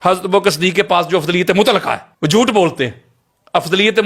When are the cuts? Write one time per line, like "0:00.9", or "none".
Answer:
0:02.1